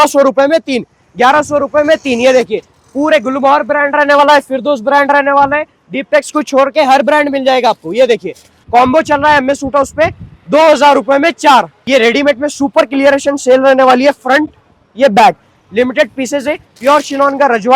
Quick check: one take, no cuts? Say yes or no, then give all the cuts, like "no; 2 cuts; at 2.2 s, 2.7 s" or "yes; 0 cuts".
no; 3 cuts; at 8.6 s, 11.8 s, 16.7 s